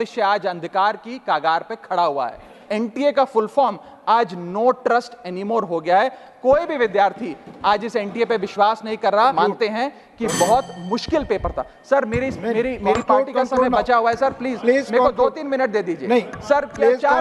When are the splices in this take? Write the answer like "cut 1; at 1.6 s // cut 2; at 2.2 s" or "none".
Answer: cut 1; at 2.6 s // cut 2; at 9.3 s